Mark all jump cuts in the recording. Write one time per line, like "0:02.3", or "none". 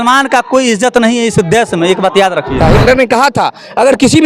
0:02.6